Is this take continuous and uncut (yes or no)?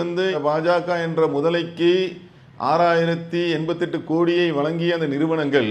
yes